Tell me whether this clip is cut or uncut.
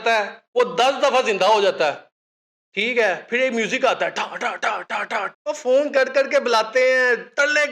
cut